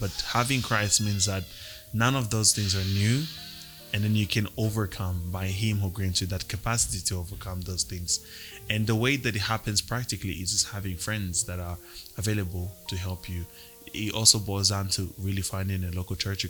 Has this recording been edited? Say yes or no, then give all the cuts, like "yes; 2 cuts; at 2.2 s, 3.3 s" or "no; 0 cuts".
no; 0 cuts